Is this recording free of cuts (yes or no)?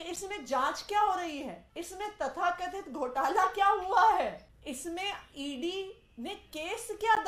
no